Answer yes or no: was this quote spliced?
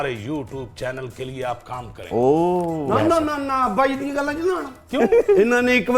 no